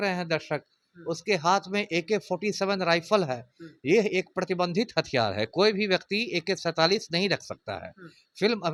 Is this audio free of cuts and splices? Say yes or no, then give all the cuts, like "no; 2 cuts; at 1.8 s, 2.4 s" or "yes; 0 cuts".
yes; 0 cuts